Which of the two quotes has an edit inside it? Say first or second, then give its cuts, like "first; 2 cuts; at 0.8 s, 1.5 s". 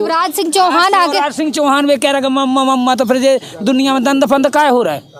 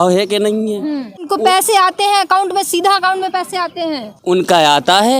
second; 2 cuts; at 1.3 s, 4.1 s